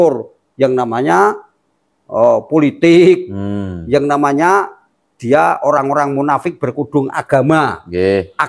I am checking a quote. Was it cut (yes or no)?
no